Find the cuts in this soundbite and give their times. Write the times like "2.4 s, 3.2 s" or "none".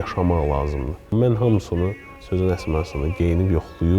2.1 s